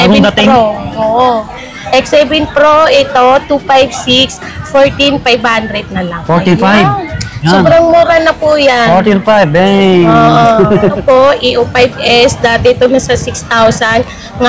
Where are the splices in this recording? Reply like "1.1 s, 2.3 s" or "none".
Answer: 11.0 s